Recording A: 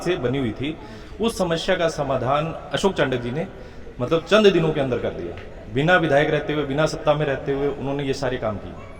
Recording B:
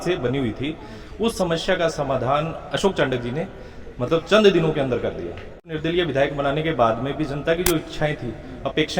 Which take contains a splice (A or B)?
B